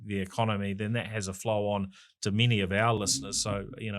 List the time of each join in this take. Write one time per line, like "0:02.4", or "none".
0:03.0